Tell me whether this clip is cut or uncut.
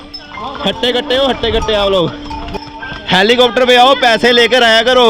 cut